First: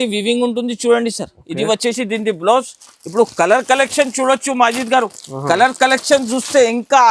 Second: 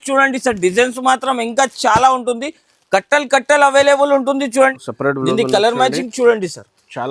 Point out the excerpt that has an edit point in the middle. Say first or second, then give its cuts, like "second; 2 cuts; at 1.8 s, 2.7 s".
second; 1 cut; at 4.6 s